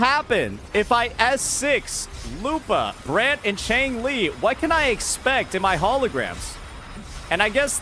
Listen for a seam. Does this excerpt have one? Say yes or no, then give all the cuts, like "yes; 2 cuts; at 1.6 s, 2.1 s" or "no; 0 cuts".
no; 0 cuts